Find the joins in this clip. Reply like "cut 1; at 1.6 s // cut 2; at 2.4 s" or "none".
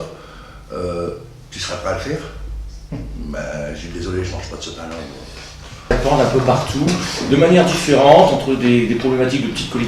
cut 1; at 6.0 s